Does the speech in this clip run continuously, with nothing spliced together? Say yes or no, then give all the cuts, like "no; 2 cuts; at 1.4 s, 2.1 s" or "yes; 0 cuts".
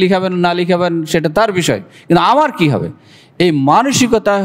yes; 0 cuts